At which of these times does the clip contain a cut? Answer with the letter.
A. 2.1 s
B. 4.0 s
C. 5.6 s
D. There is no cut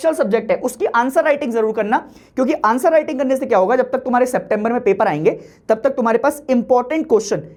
D